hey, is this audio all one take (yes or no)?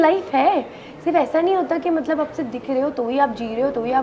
yes